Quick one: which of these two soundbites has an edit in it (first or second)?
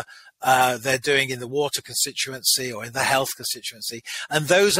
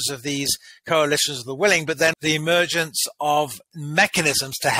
second